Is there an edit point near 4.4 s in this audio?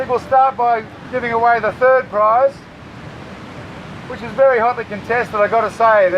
no; 1 cut; at 1.0 s

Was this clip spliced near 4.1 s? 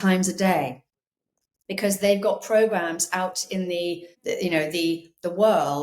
yes; 1 cut; at 4.1 s

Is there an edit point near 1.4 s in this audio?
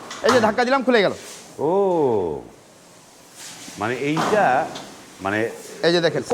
no; 0 cuts

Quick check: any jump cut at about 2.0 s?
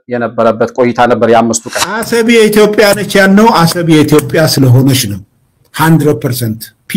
yes; 1 cut; at 2.0 s

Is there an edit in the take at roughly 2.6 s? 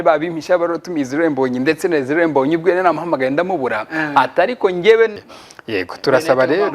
no; 1 cut; at 5.3 s

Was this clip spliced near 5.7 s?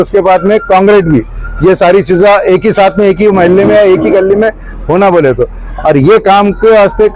yes; 1 cut; at 5.7 s

